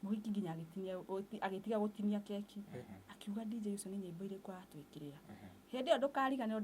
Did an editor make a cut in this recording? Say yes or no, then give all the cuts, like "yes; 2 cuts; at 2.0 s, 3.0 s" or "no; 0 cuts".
no; 0 cuts